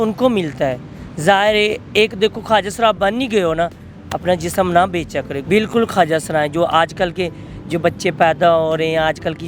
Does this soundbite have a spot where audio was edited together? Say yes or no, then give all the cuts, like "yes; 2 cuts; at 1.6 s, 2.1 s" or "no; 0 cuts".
yes; 1 cut; at 5.4 s